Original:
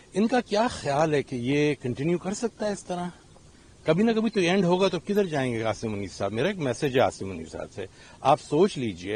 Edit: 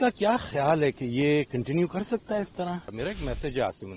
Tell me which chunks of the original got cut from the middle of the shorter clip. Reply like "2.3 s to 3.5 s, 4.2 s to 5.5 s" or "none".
3.2 s to 6.3 s